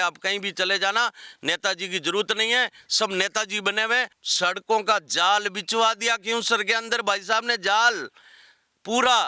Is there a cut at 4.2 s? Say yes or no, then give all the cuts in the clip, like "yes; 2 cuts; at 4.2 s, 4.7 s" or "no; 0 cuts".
yes; 1 cut; at 4.2 s